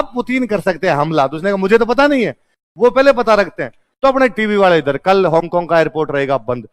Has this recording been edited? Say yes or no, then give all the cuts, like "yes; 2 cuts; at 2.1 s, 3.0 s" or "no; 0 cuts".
no; 0 cuts